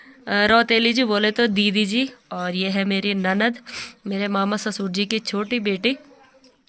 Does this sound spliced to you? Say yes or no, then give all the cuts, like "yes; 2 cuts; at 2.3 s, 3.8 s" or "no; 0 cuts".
no; 0 cuts